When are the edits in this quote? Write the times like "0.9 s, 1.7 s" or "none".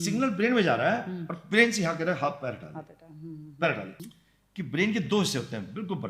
4.0 s